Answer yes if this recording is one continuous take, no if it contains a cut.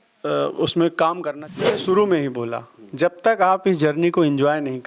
no